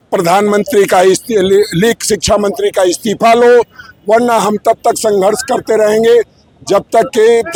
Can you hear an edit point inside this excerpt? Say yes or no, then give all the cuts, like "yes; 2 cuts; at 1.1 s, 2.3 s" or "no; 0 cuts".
no; 0 cuts